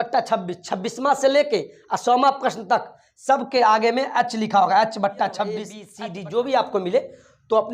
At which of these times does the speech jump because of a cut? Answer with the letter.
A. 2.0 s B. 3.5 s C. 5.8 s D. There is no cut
C